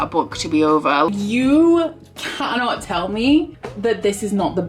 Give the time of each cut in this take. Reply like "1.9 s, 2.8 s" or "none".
1.1 s